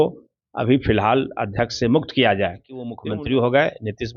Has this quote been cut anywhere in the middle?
yes; 1 cut; at 3.0 s

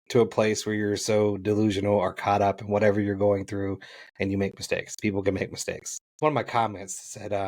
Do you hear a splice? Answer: yes; 1 cut; at 6.2 s

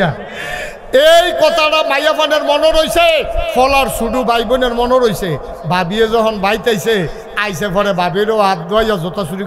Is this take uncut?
no; 1 cut; at 3.5 s

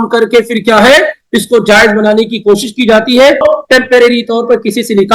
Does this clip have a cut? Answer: yes; 1 cut; at 3.4 s

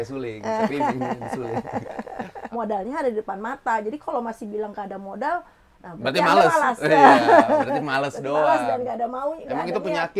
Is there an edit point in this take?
yes; 1 cut; at 2.4 s

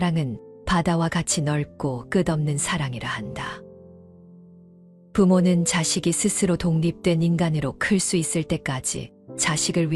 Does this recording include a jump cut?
no; 0 cuts

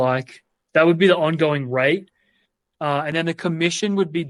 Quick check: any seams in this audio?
no; 0 cuts

